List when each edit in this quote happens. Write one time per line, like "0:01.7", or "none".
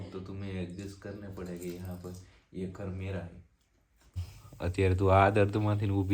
0:04.4